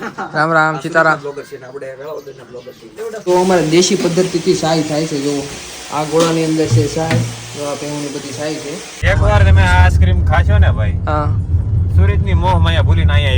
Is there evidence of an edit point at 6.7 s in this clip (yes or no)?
no